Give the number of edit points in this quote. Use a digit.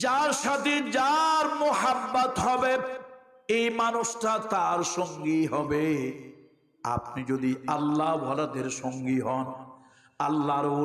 0